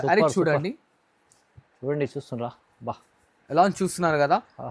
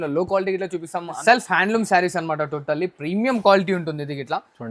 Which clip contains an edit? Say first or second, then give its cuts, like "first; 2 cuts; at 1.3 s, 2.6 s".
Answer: second; 1 cut; at 1.2 s